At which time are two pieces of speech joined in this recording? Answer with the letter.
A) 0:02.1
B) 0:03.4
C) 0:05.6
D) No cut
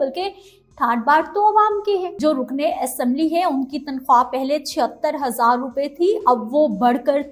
A